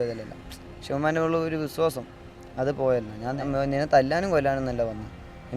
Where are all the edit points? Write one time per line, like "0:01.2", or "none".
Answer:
0:03.4